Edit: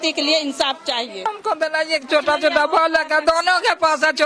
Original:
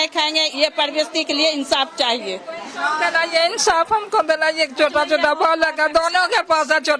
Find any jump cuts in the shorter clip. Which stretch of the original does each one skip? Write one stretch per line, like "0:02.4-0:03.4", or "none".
0:02.4-0:03.9